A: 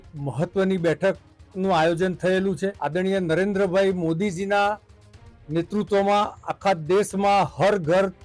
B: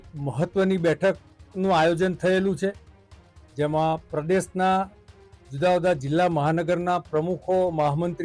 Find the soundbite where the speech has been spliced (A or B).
A